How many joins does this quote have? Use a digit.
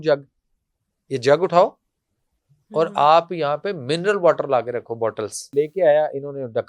1